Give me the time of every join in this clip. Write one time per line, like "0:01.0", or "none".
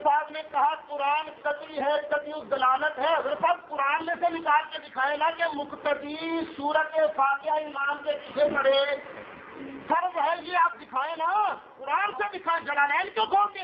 0:07.6